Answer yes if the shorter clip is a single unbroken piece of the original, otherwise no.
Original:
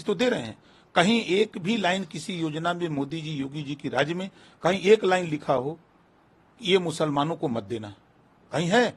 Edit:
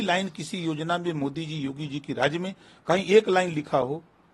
yes